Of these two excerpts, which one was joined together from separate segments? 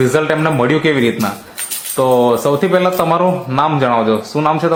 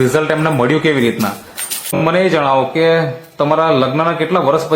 second; 1 cut; at 2.0 s

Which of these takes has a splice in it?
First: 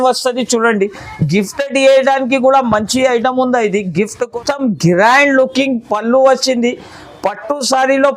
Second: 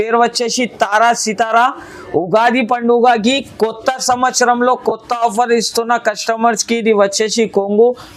first; 1 cut; at 4.3 s

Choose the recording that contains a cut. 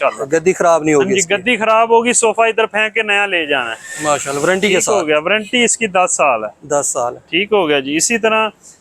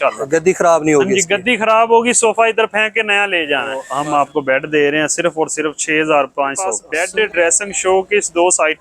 second; 2 cuts; at 3.9 s, 6.9 s

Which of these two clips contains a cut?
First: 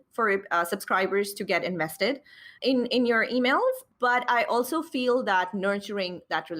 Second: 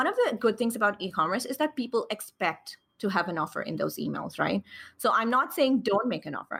first; 2 cuts; at 2.5 s, 3.9 s

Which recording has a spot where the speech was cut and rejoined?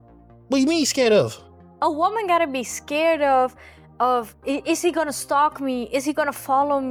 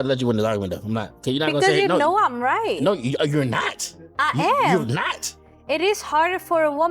second; 1 cut; at 1.1 s

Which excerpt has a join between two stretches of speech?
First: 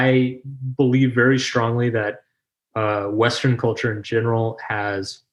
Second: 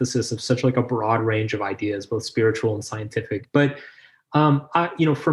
second; 1 cut; at 3.4 s

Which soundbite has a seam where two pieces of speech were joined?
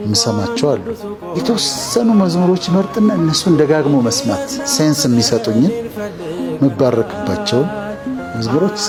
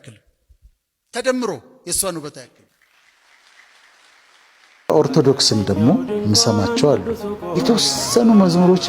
second; 1 cut; at 4.8 s

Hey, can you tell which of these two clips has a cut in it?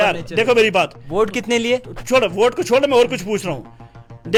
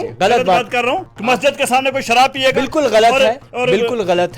second; 1 cut; at 1.1 s

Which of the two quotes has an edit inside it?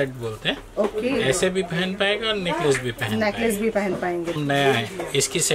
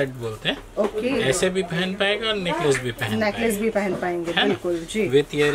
first; 1 cut; at 4.4 s

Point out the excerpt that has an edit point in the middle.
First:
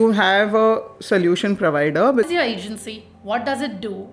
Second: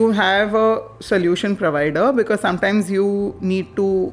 first; 1 cut; at 2.3 s

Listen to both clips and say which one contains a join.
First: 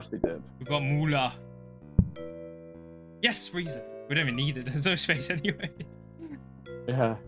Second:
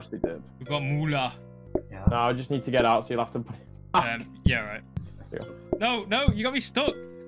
second; 2 cuts; at 1.5 s, 5.0 s

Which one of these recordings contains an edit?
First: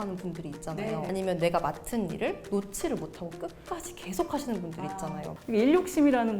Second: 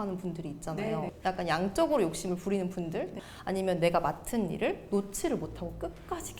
first; 2 cuts; at 1.1 s, 5.3 s

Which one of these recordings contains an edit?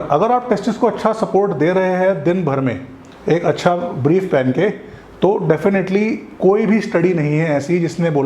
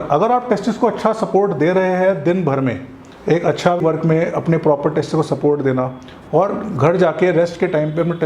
second; 1 cut; at 3.8 s

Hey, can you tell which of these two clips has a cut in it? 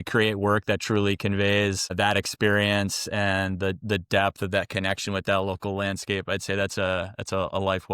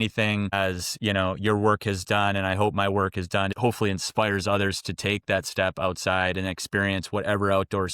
second; 1 cut; at 3.5 s

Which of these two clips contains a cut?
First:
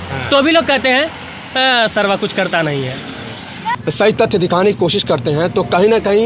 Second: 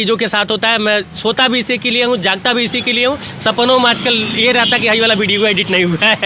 first; 1 cut; at 3.8 s

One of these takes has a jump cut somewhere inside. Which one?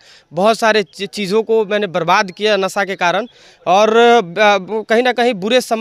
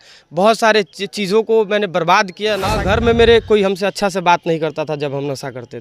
second; 1 cut; at 2.8 s

